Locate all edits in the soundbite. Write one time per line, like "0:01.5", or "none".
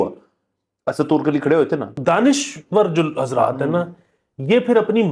0:01.9